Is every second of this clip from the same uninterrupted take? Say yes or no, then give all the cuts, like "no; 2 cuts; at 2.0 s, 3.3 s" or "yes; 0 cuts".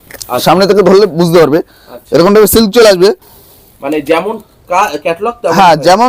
yes; 0 cuts